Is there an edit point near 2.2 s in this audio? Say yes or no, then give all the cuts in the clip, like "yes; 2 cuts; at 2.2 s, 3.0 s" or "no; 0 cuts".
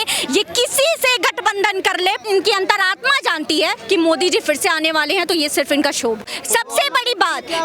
yes; 2 cuts; at 2.2 s, 6.2 s